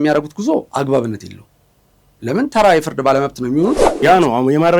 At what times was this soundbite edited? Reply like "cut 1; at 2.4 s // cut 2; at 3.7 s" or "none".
cut 1; at 3.9 s

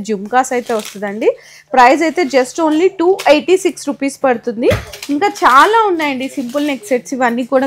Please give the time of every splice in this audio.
none

